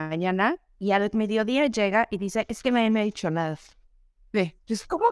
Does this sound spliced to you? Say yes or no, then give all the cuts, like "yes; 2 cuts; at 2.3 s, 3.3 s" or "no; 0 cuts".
no; 0 cuts